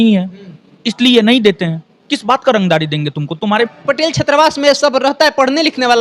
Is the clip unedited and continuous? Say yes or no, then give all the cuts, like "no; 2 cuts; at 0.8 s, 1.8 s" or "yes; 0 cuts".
no; 1 cut; at 3.4 s